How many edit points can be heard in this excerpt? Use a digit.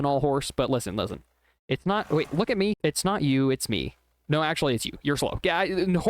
0